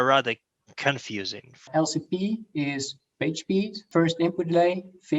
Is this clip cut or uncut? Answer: cut